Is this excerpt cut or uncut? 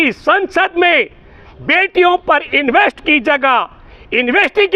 uncut